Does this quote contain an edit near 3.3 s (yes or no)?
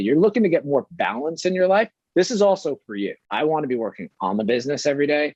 yes